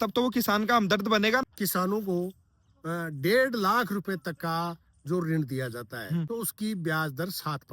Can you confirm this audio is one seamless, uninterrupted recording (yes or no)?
no